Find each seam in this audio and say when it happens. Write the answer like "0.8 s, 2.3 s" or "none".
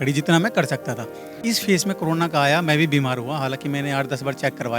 1.4 s